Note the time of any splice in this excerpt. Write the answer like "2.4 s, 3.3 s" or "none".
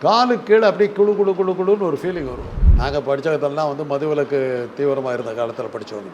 2.6 s